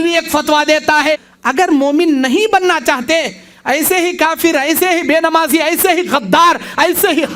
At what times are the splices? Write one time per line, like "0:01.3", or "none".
0:01.3